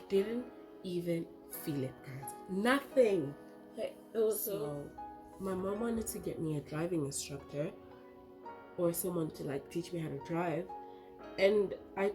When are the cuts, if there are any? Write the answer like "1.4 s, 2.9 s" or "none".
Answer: 4.7 s

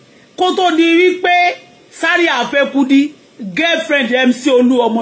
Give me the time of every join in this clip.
none

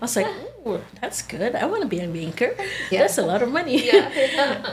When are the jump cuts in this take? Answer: none

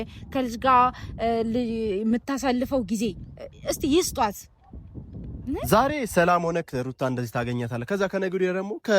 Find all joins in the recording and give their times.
5.6 s

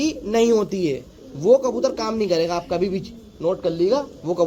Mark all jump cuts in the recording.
none

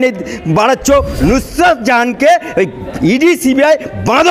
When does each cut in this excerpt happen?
1.1 s

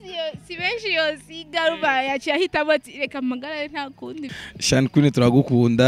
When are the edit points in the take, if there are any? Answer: 4.3 s

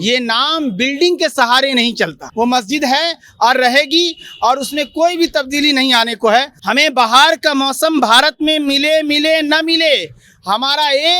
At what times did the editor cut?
2.2 s, 6.6 s

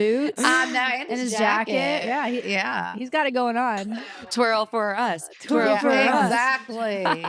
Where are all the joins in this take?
4.3 s

